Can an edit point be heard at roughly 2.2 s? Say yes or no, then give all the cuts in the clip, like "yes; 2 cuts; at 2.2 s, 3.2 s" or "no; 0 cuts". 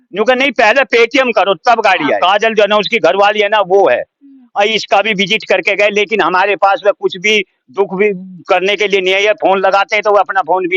yes; 1 cut; at 2.2 s